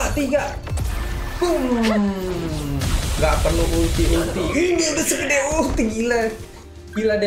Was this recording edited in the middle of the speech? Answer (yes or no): no